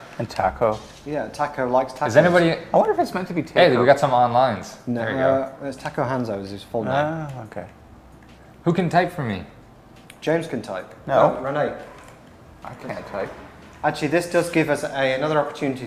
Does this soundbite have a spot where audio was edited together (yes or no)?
no